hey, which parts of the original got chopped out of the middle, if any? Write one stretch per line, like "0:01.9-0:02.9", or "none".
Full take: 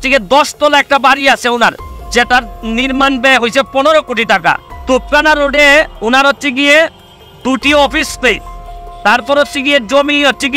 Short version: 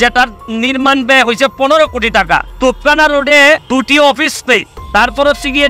0:04.6-0:04.8
0:05.9-0:07.4
0:08.5-0:08.9